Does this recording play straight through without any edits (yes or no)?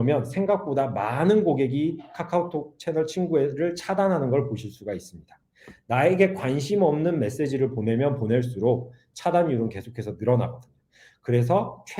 yes